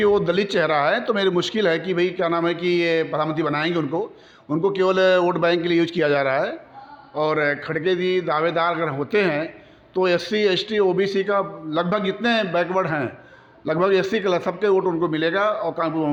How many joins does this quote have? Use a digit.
0